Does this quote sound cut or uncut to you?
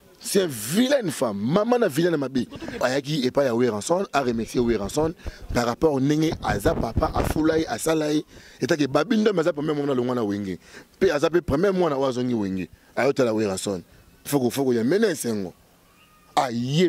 cut